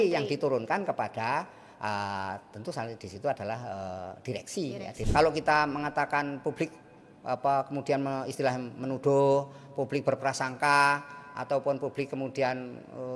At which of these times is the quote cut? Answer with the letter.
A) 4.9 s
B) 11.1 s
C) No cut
A